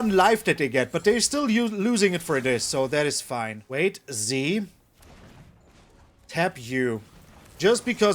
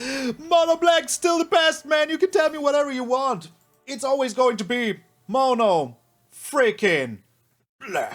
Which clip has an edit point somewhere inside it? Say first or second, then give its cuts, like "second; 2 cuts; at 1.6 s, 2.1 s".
first; 1 cut; at 3.6 s